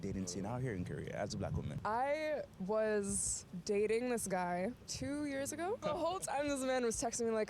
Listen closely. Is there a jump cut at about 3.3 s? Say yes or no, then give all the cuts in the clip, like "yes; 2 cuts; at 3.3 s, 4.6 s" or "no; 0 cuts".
no; 2 cuts; at 1.7 s, 5.8 s